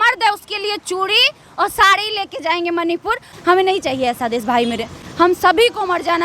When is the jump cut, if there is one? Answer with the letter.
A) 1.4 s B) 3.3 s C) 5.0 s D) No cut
B